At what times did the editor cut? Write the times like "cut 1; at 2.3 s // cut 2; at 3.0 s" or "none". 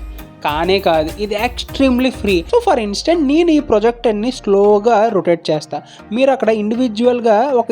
cut 1; at 2.5 s